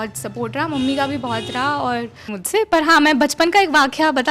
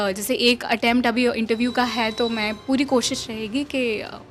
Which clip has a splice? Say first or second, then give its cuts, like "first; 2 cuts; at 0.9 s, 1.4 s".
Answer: first; 1 cut; at 2.3 s